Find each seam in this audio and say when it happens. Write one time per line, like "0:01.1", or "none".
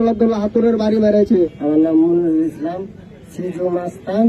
none

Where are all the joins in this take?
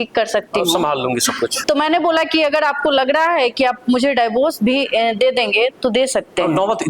0:01.6

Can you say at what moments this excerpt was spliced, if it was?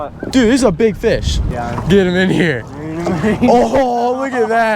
0:01.4

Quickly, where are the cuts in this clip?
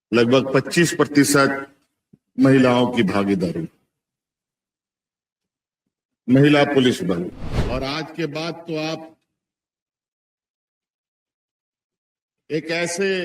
0:07.5

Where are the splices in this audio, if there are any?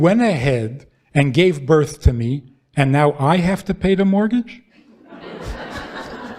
none

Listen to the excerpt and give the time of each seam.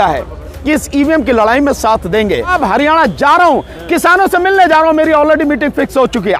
0:02.5

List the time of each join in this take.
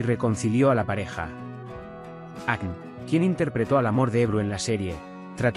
0:01.3
0:02.5

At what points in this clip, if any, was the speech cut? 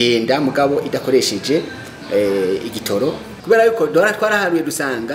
0:03.3

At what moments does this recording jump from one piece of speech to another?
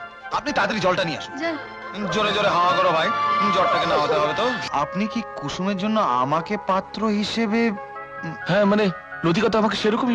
0:04.6

